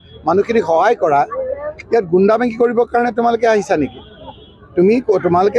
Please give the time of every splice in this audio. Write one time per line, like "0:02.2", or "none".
0:01.1